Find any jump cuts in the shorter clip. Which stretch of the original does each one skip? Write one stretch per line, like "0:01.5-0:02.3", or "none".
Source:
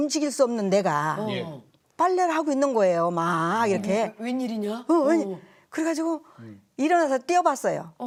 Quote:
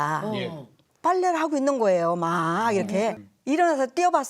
0:04.2-0:06.5